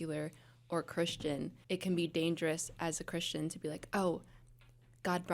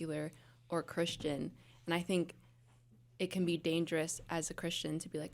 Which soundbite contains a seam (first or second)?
first